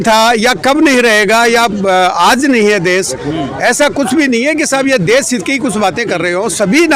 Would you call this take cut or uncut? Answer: uncut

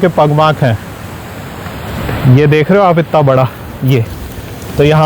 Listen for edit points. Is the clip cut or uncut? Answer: uncut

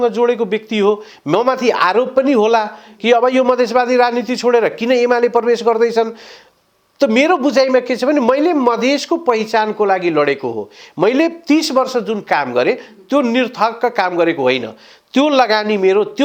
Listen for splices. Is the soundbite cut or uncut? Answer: uncut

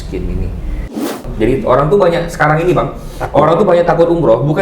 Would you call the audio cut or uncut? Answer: cut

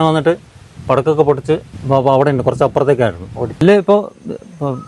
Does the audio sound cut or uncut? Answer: cut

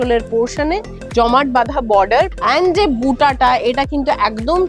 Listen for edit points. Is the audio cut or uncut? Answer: cut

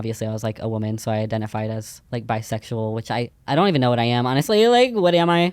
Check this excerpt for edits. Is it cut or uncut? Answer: cut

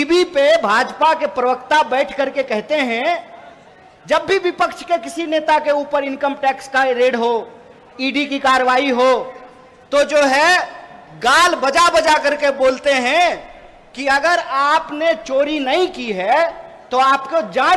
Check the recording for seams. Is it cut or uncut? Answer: uncut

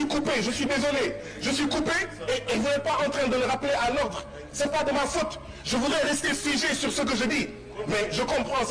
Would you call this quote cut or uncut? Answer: uncut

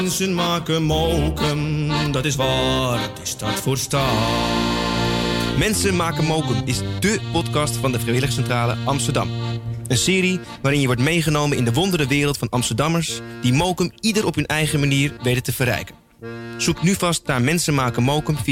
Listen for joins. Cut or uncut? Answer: uncut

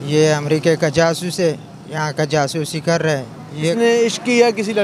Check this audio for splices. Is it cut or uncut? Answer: cut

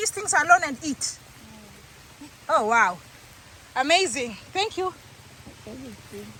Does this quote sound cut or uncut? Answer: uncut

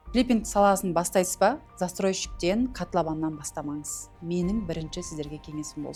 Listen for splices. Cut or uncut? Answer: uncut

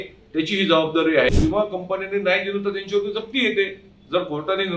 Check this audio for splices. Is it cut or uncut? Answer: cut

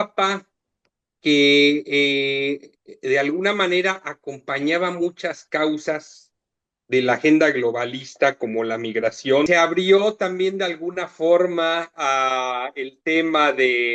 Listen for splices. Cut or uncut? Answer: cut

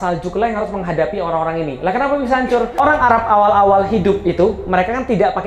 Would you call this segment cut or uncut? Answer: cut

